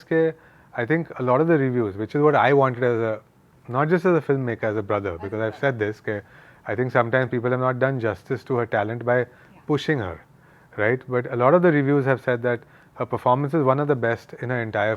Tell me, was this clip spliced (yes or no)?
no